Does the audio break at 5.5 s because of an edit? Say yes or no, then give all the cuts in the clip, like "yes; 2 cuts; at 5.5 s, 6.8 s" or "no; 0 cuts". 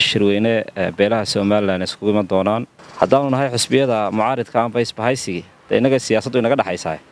no; 1 cut; at 2.7 s